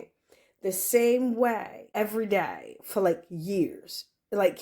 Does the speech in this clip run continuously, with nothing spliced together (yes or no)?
no